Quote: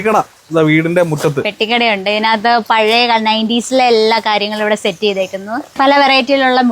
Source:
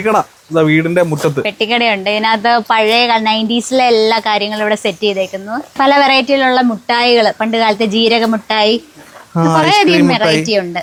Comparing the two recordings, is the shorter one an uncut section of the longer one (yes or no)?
yes